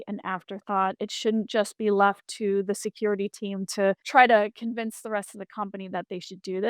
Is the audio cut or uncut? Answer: cut